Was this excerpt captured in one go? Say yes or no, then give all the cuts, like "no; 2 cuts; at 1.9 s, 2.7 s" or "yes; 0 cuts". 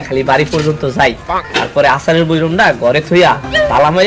yes; 0 cuts